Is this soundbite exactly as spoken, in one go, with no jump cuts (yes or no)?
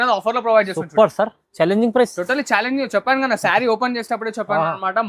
yes